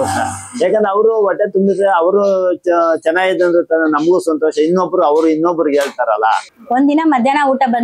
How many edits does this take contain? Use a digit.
1